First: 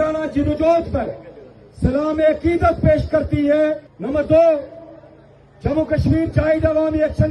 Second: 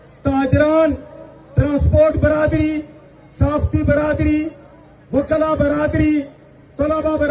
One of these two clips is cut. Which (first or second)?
first